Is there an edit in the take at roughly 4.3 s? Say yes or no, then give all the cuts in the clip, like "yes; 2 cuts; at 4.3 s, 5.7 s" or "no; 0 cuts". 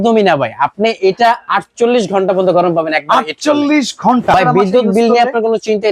yes; 1 cut; at 4.3 s